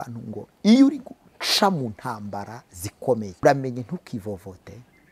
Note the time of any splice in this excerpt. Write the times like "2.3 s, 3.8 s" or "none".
3.3 s